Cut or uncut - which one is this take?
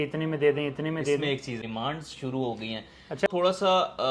cut